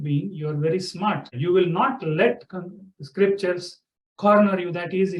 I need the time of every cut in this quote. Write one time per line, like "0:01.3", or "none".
0:01.4